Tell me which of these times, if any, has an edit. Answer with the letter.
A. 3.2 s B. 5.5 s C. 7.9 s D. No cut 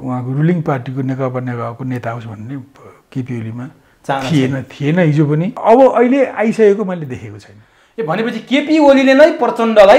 B